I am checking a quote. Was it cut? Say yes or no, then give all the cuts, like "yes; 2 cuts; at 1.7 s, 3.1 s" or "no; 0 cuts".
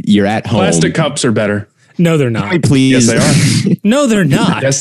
yes; 1 cut; at 1.8 s